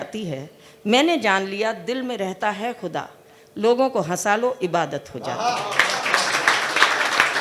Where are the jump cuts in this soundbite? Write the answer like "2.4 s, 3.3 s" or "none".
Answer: none